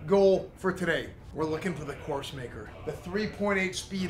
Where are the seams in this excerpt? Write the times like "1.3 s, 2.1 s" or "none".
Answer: 1.2 s, 2.7 s